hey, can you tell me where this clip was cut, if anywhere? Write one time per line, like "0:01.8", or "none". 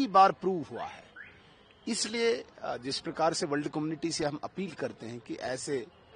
none